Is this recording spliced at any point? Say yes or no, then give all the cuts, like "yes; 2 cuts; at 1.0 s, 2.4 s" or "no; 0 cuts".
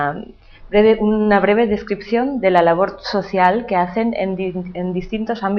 yes; 1 cut; at 1.4 s